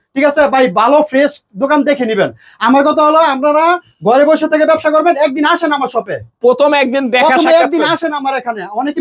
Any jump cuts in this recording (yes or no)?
no